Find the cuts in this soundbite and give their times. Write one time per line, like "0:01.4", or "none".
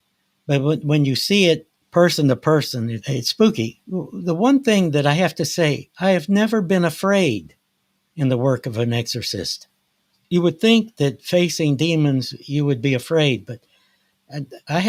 none